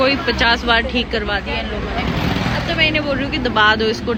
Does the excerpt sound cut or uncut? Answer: uncut